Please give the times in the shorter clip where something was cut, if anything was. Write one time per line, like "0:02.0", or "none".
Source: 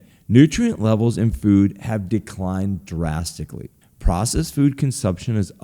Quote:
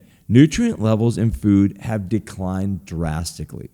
none

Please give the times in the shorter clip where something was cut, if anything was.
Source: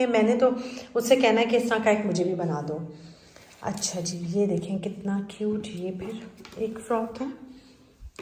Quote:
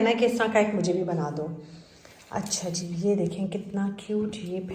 none

